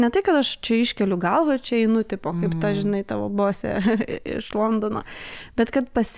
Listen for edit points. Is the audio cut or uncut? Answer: uncut